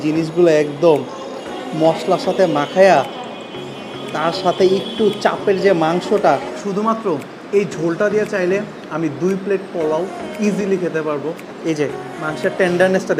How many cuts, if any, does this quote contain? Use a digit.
2